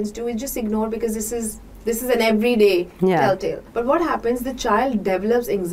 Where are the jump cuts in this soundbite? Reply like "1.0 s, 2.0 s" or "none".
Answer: 3.6 s

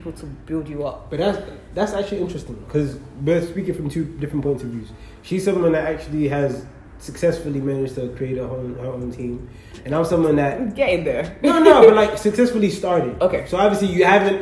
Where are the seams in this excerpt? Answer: none

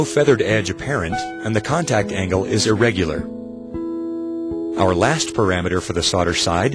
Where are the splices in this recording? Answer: 3.2 s, 4.5 s

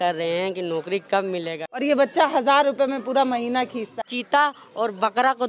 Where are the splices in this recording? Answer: 1.8 s, 3.9 s

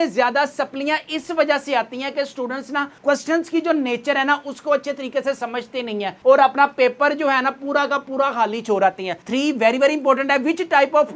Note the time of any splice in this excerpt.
9.2 s

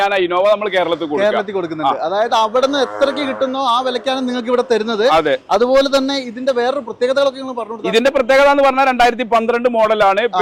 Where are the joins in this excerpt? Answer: none

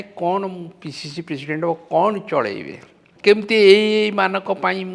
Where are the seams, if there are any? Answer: 3.1 s

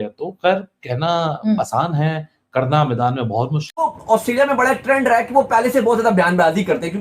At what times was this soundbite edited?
3.8 s

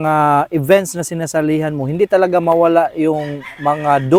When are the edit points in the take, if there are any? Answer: none

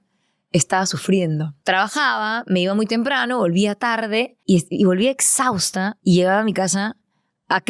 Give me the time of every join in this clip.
1.5 s, 4.3 s, 5.9 s

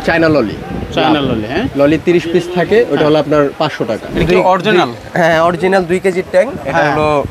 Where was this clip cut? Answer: 4.0 s

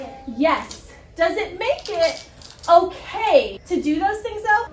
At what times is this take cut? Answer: 3.6 s

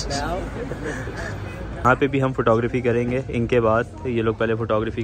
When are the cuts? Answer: 1.8 s

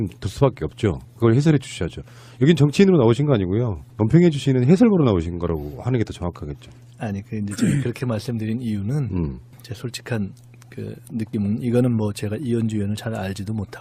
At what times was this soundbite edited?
none

